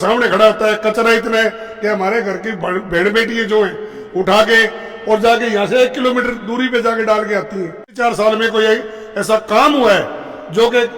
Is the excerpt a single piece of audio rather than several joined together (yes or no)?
no